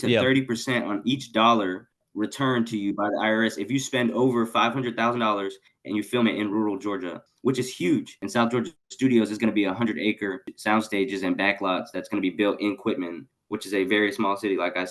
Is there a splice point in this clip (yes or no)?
yes